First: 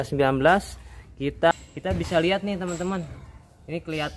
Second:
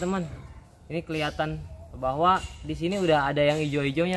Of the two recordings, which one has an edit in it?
first; 1 cut; at 1.5 s

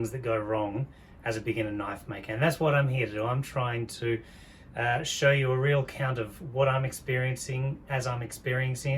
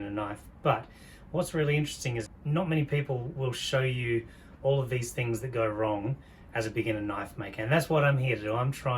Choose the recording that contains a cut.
second; 1 cut; at 2.3 s

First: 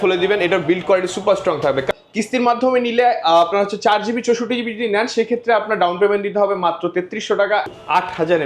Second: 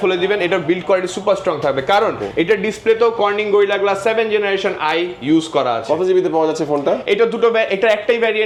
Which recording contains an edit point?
first; 2 cuts; at 1.9 s, 7.7 s

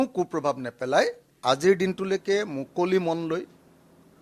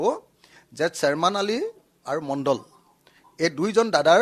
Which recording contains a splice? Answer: first; 1 cut; at 1.3 s

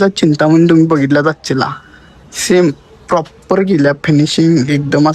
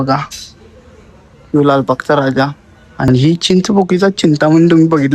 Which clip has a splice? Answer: second; 1 cut; at 3.1 s

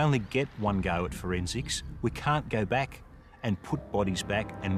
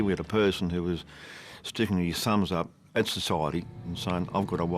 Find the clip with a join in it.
second; 1 cut; at 3.7 s

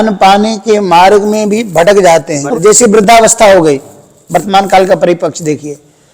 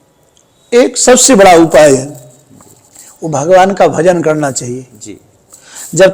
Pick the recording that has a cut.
first; 1 cut; at 2.6 s

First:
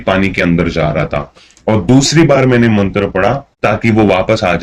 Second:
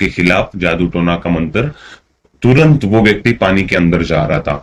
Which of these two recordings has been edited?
first; 1 cut; at 3.5 s

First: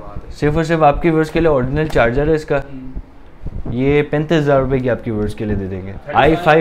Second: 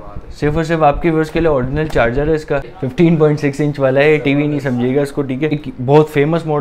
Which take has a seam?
second; 2 cuts; at 2.8 s, 5.5 s

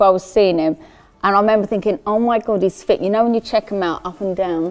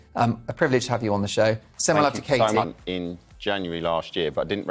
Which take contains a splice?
second; 1 cut; at 2.8 s

